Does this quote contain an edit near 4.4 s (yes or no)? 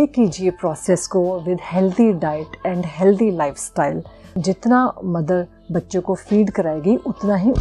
yes